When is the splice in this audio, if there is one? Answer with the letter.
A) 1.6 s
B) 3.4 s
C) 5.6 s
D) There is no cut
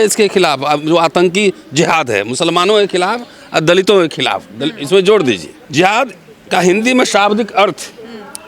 C